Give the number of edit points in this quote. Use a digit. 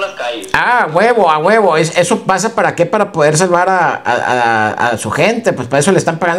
0